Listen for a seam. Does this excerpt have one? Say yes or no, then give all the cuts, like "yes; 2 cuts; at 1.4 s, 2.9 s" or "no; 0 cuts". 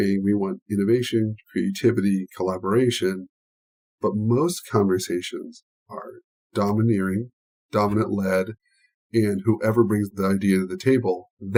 no; 0 cuts